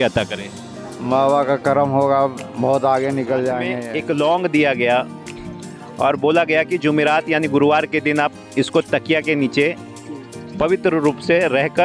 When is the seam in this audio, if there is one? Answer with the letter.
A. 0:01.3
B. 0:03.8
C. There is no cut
B